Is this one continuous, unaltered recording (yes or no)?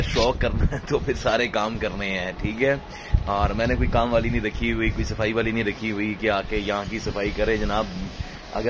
yes